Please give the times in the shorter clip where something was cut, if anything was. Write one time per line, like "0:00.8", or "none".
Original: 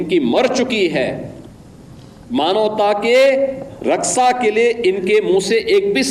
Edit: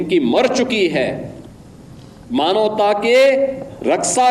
none